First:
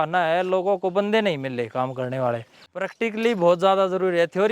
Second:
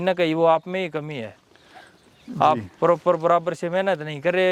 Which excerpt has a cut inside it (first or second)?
first